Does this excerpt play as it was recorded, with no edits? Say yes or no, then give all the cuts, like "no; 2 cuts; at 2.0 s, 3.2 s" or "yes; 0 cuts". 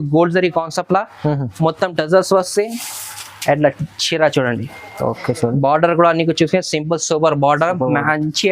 yes; 0 cuts